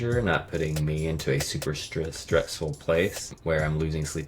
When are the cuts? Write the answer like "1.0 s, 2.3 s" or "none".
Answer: 3.3 s